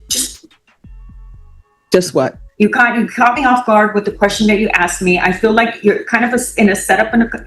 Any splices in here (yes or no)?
yes